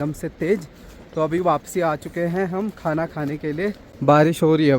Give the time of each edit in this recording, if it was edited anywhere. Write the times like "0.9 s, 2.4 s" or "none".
3.9 s